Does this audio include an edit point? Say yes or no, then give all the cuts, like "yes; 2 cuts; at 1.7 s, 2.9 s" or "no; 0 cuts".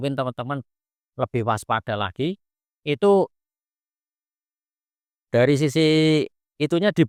no; 0 cuts